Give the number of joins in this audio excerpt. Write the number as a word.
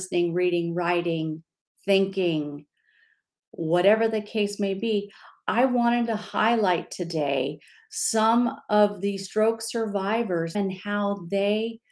one